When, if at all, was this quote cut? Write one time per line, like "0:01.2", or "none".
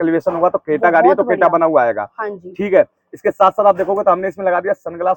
none